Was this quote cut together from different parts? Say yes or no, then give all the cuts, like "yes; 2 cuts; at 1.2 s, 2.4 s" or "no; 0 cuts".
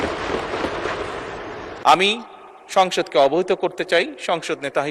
yes; 1 cut; at 1.7 s